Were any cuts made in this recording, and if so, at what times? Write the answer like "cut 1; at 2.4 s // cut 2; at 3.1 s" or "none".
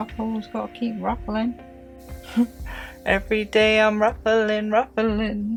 none